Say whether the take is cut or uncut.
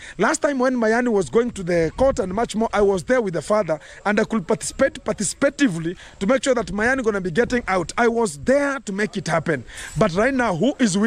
uncut